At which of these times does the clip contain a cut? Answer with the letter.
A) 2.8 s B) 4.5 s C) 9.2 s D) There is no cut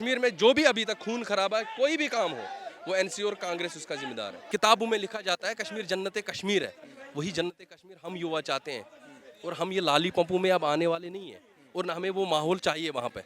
B